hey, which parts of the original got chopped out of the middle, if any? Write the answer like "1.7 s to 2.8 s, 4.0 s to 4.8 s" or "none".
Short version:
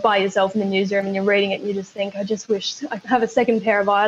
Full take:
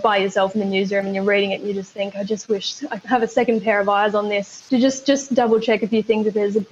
none